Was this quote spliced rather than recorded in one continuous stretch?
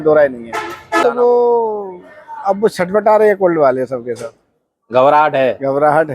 yes; 1 cut; at 1.0 s

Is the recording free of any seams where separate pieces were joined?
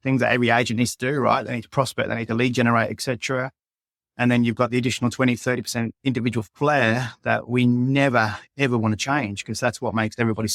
yes; 0 cuts

